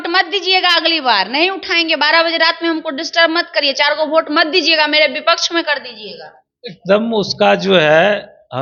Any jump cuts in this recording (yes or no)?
no